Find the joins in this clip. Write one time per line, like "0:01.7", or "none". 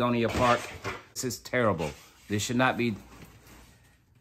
0:01.3